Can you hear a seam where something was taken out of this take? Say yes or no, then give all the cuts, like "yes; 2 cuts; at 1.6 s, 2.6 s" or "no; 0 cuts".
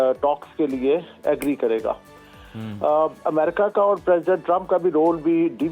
no; 0 cuts